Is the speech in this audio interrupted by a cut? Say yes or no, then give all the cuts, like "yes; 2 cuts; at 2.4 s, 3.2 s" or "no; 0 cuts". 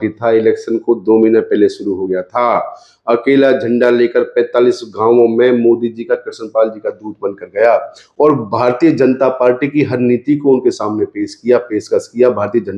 no; 0 cuts